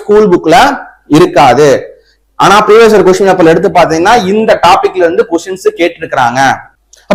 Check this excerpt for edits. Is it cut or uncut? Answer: uncut